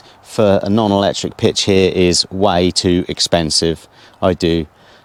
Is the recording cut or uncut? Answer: uncut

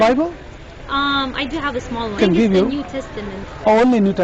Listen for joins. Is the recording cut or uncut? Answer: cut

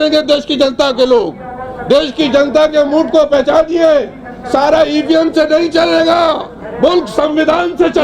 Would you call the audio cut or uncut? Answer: uncut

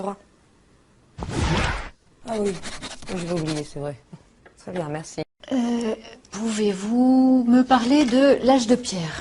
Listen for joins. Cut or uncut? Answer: cut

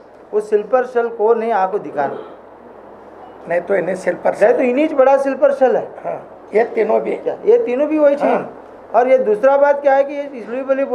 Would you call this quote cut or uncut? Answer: uncut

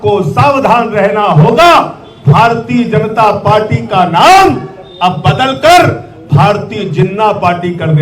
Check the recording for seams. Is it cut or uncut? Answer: uncut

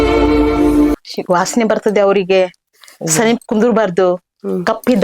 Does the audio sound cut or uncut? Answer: cut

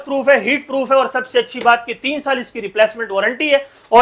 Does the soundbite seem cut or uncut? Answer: uncut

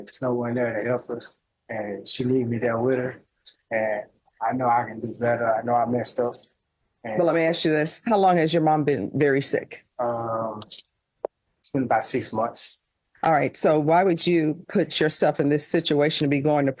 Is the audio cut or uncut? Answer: uncut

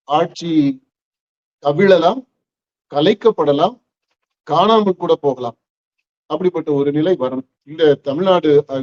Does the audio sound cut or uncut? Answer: uncut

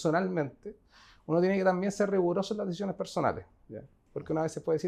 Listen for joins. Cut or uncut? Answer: uncut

